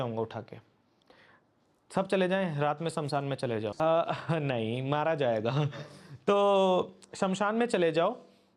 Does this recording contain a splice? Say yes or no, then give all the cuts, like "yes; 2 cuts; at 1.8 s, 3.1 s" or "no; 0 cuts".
no; 0 cuts